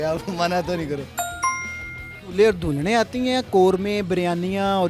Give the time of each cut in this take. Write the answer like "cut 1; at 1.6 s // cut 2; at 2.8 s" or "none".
cut 1; at 1.8 s